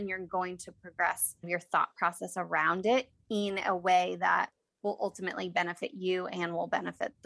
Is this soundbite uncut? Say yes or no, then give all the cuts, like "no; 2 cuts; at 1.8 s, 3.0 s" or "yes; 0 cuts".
yes; 0 cuts